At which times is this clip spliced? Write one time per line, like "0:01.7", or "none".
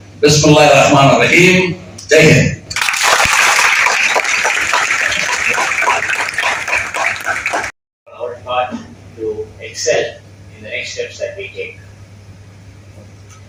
none